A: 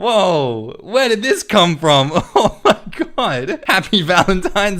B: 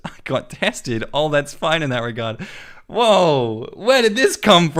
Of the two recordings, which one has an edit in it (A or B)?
A